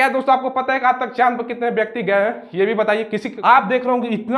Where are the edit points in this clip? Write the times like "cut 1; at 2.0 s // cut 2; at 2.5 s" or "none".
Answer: cut 1; at 3.3 s